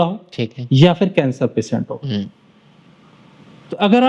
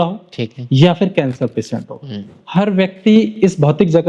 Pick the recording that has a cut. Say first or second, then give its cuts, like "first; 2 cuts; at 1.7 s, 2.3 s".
second; 1 cut; at 2.3 s